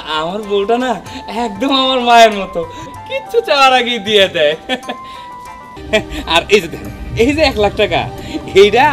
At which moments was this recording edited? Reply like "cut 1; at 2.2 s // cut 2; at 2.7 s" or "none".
cut 1; at 5.7 s